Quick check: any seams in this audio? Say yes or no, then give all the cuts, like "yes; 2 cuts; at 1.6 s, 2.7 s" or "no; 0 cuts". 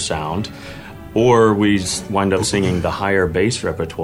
no; 0 cuts